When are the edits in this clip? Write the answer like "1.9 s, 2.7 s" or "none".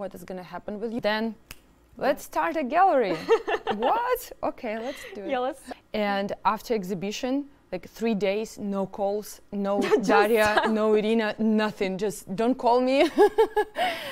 1.0 s, 5.6 s